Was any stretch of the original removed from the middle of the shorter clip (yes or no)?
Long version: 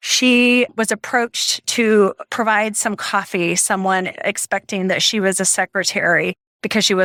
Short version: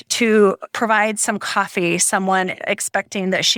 no